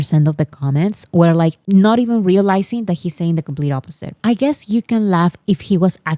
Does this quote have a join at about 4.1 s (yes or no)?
yes